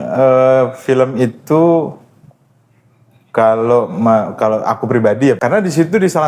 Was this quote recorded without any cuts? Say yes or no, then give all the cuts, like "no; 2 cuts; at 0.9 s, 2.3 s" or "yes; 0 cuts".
no; 1 cut; at 5.4 s